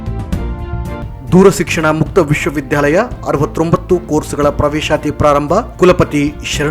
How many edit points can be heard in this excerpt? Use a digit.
1